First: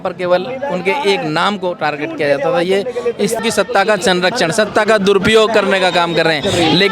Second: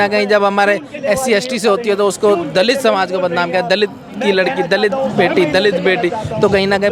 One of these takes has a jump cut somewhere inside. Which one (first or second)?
first